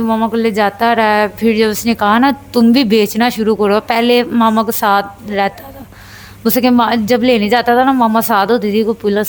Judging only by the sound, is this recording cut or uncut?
uncut